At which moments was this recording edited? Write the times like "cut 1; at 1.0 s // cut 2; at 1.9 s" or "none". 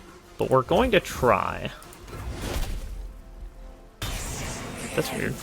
cut 1; at 2.3 s